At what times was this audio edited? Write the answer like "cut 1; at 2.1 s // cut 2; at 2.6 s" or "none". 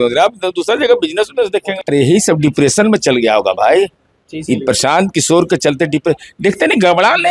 cut 1; at 1.7 s